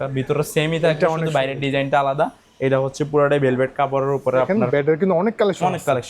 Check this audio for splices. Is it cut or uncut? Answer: cut